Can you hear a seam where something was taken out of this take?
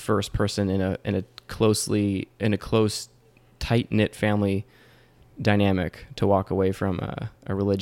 no; 0 cuts

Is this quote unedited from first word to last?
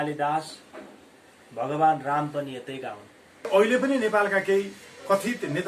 no; 1 cut; at 3.5 s

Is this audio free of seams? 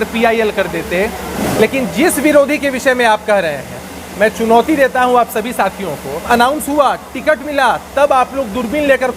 no; 2 cuts; at 1.4 s, 6.2 s

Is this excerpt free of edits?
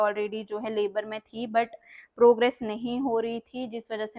yes; 0 cuts

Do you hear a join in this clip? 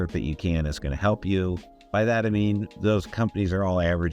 yes; 1 cut; at 1.7 s

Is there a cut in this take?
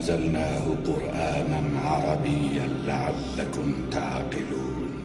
no; 0 cuts

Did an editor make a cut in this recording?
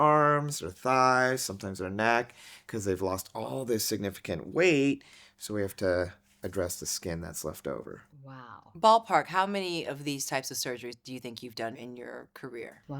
yes; 1 cut; at 11.8 s

